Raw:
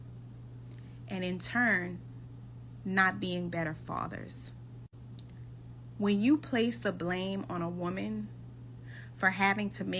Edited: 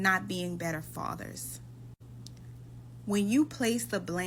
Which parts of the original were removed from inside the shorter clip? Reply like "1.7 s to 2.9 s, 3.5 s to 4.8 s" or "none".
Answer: none